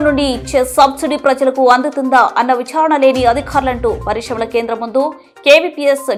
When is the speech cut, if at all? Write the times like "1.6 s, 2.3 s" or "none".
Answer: none